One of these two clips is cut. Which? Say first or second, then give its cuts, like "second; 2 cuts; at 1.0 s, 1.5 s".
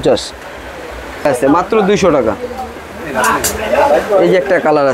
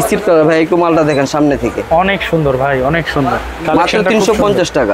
first; 1 cut; at 1.3 s